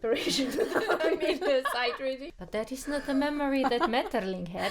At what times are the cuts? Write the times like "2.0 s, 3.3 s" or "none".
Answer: 2.3 s